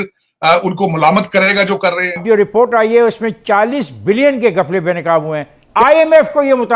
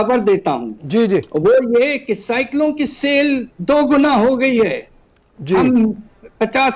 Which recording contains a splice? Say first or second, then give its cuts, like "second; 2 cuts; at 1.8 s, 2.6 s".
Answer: first; 2 cuts; at 2.1 s, 5.7 s